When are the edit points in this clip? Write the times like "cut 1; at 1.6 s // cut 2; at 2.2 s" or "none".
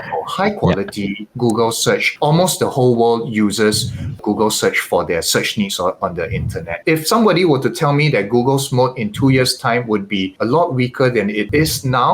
cut 1; at 6.8 s